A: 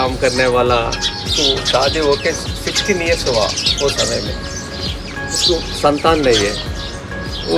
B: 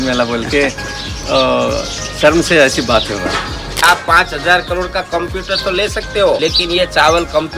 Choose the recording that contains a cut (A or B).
B